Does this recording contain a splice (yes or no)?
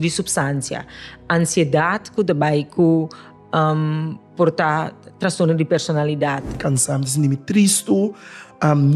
yes